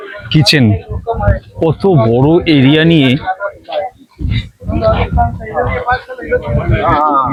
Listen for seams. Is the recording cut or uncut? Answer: uncut